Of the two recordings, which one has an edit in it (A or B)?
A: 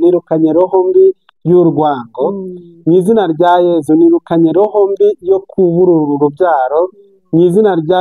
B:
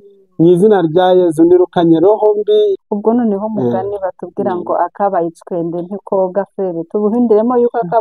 B